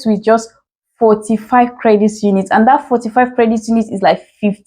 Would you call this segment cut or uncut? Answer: uncut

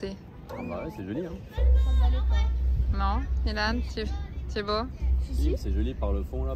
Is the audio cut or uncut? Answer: uncut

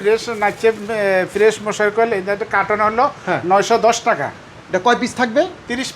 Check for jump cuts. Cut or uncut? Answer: uncut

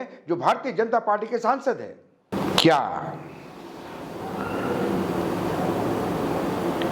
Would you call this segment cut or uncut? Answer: uncut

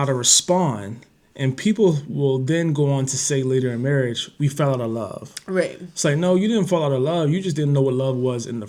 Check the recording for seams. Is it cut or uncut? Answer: uncut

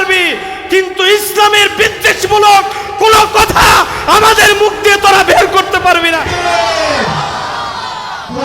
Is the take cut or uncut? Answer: cut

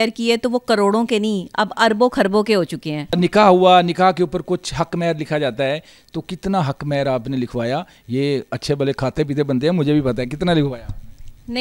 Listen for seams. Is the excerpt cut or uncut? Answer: uncut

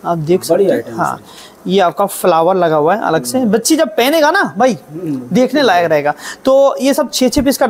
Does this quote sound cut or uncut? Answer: uncut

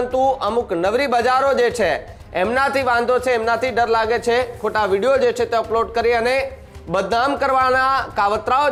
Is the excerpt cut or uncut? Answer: uncut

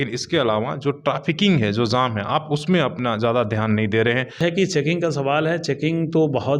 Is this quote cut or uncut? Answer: cut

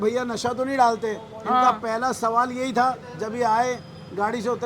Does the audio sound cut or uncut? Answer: uncut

